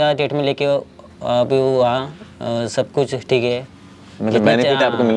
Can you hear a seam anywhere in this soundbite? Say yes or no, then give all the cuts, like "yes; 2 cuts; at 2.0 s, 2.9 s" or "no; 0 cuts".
no; 0 cuts